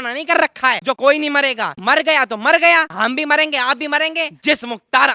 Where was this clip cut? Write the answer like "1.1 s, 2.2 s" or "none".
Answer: 0.9 s, 1.8 s, 2.9 s, 4.4 s